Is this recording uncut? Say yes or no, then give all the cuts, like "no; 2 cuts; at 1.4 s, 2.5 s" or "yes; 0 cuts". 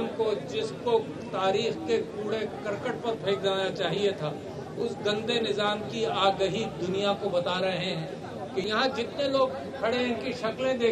no; 1 cut; at 8.6 s